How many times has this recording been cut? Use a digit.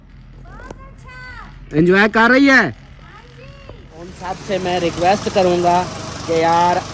1